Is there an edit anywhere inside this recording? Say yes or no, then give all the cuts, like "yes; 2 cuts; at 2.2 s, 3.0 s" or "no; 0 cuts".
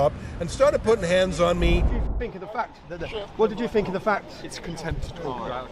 yes; 1 cut; at 2.1 s